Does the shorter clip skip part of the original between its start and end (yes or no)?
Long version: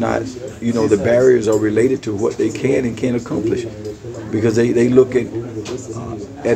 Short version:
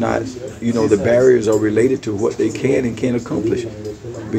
no